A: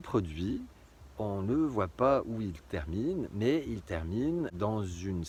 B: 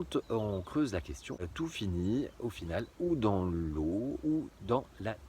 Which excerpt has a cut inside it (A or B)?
B